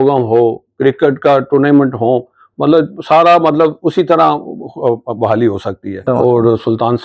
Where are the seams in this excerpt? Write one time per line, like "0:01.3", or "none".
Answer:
0:06.0